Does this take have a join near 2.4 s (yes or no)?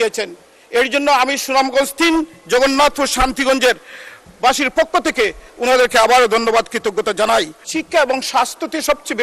no